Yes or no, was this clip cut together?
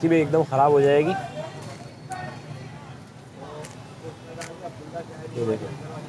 no